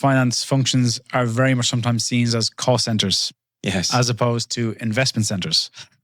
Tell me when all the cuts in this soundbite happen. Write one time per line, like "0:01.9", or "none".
none